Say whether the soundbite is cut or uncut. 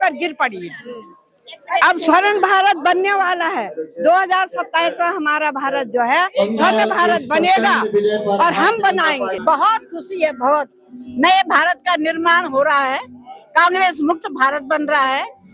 cut